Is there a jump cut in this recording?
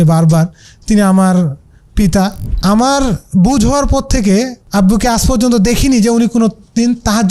yes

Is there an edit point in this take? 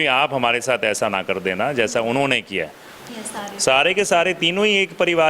yes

